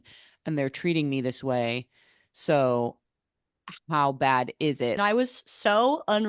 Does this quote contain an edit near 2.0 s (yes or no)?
no